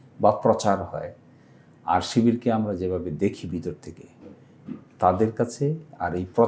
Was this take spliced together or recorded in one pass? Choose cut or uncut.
uncut